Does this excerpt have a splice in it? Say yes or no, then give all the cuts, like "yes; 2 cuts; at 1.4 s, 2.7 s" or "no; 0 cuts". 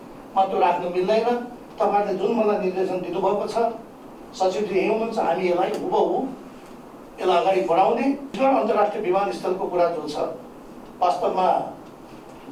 yes; 1 cut; at 8.4 s